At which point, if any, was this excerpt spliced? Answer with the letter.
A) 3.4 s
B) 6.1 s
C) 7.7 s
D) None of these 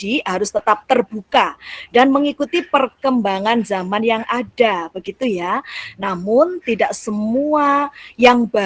D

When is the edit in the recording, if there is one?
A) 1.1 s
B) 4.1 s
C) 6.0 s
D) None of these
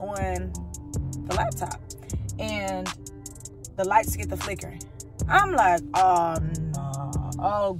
D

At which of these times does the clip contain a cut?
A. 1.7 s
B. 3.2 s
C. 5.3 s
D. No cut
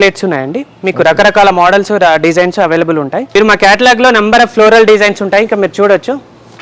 B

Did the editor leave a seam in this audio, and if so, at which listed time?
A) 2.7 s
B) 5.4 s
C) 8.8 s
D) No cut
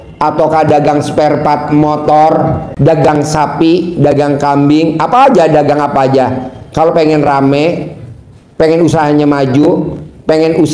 A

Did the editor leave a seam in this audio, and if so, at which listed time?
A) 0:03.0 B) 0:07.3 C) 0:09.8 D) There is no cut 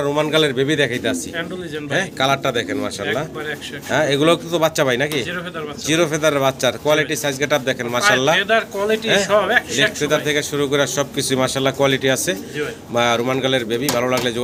D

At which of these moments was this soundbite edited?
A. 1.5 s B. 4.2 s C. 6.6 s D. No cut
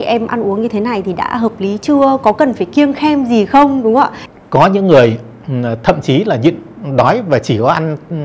B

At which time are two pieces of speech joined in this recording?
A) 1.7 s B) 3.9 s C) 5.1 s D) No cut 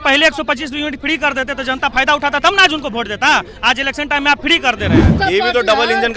C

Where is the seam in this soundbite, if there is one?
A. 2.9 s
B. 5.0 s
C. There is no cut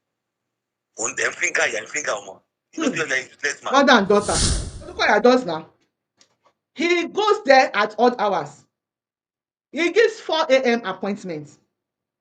B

